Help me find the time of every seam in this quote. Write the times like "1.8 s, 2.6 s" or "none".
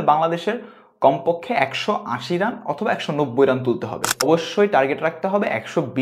4.3 s